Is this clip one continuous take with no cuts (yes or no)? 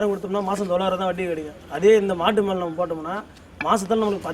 yes